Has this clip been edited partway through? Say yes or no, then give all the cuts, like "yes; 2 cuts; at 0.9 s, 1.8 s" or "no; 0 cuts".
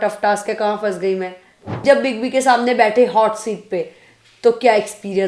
yes; 1 cut; at 1.7 s